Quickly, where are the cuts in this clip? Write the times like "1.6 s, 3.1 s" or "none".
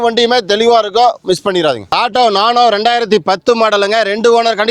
1.8 s